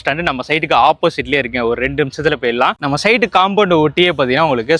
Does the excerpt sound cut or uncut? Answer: uncut